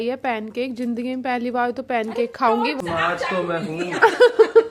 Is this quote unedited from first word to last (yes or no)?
no